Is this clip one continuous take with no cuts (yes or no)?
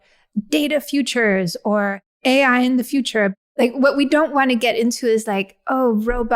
no